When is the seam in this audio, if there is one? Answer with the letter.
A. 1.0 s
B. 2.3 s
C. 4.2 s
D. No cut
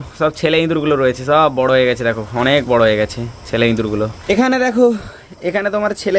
C